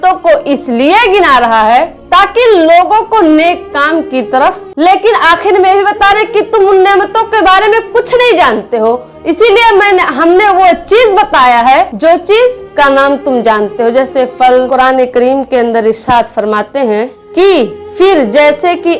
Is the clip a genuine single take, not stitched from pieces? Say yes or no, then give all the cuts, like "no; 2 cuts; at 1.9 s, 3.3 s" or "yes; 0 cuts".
no; 3 cuts; at 4.7 s, 11.9 s, 14.7 s